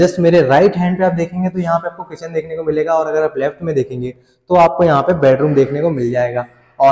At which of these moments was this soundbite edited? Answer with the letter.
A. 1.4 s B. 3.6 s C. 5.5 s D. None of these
D